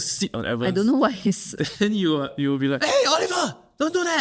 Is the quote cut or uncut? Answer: uncut